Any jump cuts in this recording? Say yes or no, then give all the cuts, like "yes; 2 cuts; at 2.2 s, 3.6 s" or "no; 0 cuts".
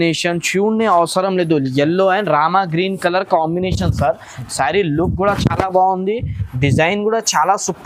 no; 0 cuts